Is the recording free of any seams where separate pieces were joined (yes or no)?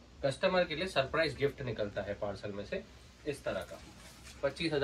yes